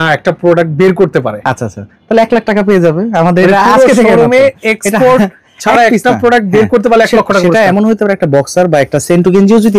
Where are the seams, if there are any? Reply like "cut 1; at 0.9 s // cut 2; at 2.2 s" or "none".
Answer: none